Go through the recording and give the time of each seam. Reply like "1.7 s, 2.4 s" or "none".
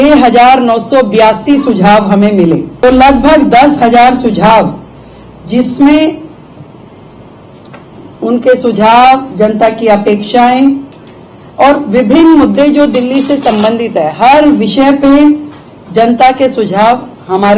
2.7 s